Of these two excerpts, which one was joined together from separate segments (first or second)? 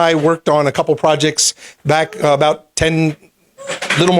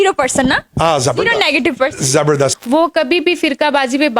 second